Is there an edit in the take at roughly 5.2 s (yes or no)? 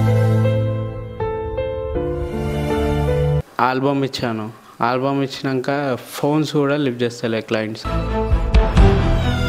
no